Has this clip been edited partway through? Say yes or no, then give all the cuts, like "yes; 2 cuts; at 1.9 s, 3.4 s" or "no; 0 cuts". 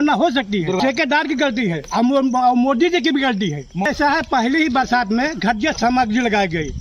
yes; 2 cuts; at 0.8 s, 3.9 s